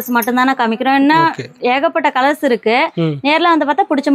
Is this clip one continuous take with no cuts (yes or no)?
yes